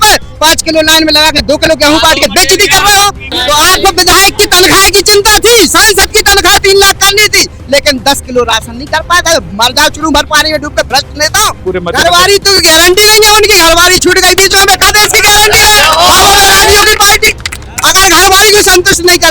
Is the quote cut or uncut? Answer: cut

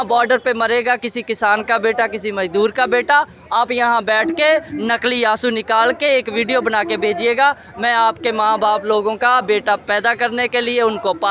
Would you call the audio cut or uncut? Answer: uncut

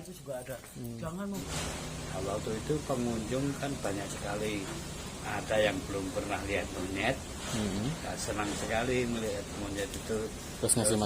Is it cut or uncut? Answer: cut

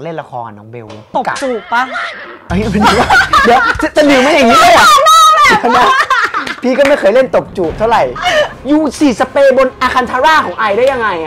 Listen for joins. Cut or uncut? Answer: cut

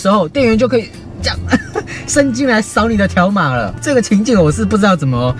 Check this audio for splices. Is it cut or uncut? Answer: uncut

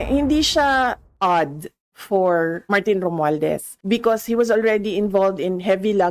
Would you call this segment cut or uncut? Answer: cut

